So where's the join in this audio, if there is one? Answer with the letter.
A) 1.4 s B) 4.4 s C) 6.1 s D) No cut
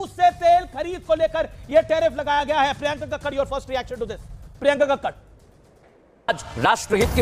C